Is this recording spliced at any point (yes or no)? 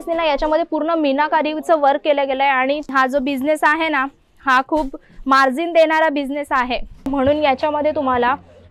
yes